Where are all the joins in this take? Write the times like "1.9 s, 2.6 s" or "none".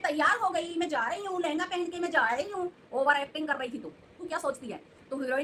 4.1 s